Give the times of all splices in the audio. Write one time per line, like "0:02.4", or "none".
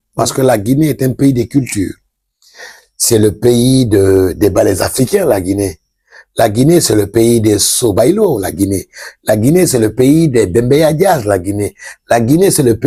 none